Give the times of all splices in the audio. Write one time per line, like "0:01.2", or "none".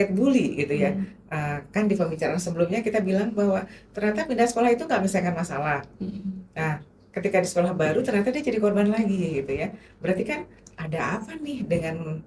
none